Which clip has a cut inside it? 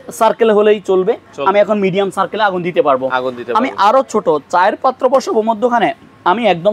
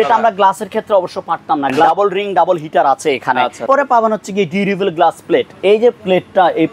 second; 2 cuts; at 1.9 s, 3.6 s

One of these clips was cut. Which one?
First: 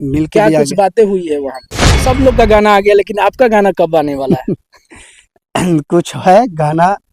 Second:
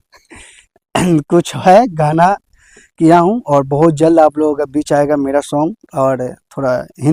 first; 1 cut; at 2.1 s

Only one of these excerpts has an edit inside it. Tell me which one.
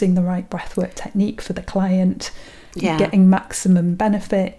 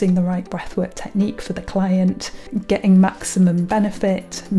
second; 1 cut; at 2.6 s

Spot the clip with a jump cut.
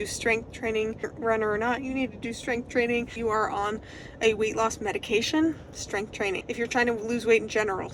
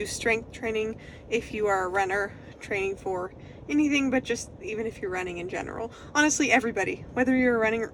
first; 3 cuts; at 1.1 s, 3.1 s, 6.4 s

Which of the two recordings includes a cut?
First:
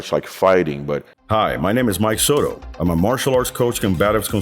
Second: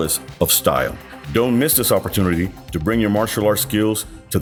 first; 1 cut; at 1.1 s

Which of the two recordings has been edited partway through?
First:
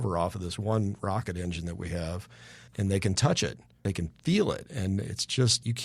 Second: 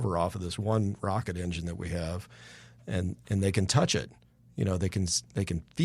first; 2 cuts; at 2.7 s, 3.7 s

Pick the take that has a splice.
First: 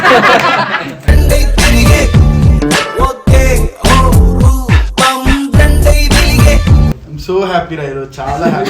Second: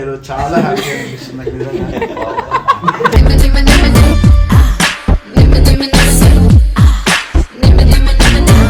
first; 1 cut; at 6.9 s

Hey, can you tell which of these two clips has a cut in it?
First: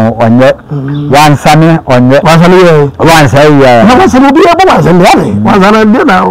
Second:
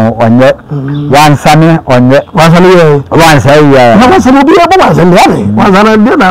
first; 1 cut; at 2.2 s

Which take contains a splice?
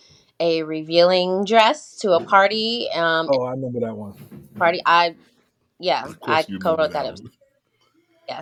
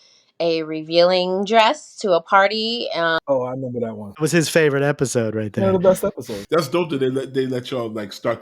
second; 2 cuts; at 4.2 s, 6.5 s

